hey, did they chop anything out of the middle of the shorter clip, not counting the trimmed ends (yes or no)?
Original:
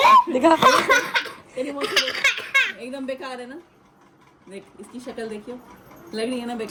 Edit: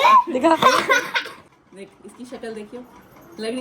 yes